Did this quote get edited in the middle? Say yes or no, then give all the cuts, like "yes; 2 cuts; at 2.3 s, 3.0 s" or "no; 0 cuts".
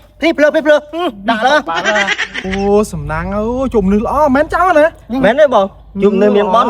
no; 0 cuts